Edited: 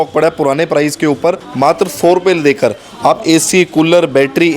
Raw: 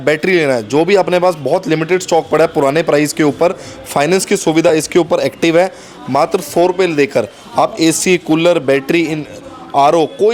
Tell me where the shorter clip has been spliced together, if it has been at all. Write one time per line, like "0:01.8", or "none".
0:01.5